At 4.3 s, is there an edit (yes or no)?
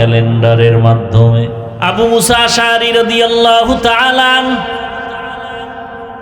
no